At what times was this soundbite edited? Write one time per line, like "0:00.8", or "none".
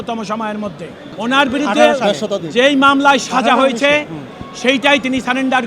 none